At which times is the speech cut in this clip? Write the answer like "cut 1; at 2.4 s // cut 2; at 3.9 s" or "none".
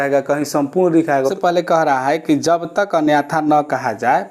cut 1; at 1.3 s